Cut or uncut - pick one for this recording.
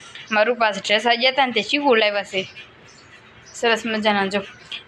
uncut